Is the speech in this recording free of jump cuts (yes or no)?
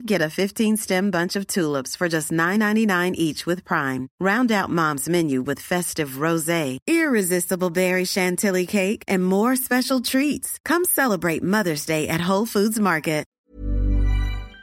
no